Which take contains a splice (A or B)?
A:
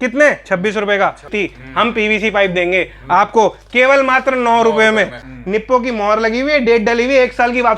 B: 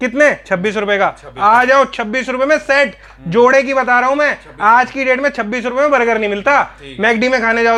A